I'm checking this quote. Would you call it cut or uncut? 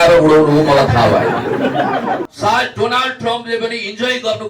cut